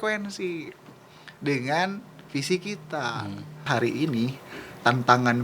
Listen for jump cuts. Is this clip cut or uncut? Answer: cut